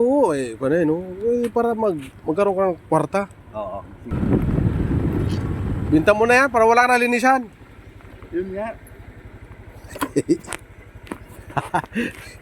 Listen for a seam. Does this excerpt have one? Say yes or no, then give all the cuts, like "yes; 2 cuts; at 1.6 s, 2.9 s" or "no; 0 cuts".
yes; 1 cut; at 4.2 s